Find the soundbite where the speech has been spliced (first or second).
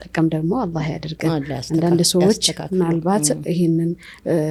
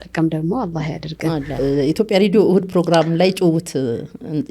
second